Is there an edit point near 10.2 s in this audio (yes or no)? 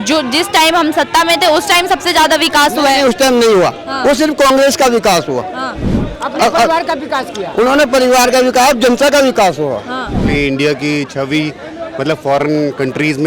yes